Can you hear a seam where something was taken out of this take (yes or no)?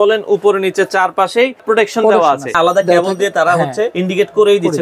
yes